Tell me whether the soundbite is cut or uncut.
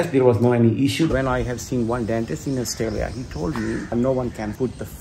cut